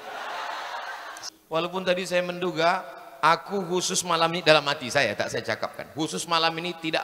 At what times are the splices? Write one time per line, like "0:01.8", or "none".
0:01.1